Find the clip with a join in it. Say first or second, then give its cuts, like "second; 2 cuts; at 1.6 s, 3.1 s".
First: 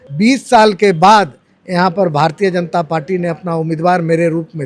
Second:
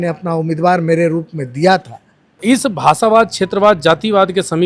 second; 1 cut; at 2.4 s